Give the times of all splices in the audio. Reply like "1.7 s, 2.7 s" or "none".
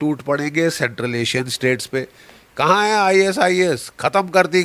2.6 s